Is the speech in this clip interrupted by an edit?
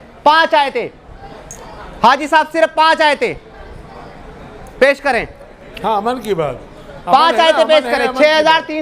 no; 0 cuts

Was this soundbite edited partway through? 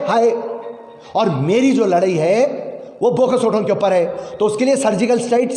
no; 0 cuts

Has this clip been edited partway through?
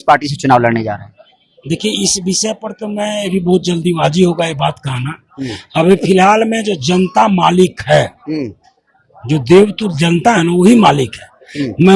no; 0 cuts

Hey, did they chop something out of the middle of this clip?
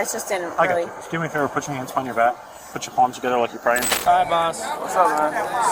yes; 1 cut; at 4.0 s

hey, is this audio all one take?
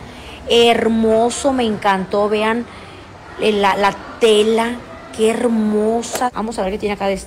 no; 1 cut; at 6.3 s

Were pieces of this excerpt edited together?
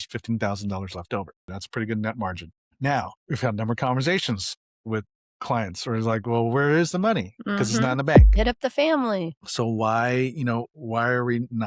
yes; 2 cuts; at 1.5 s, 8.3 s

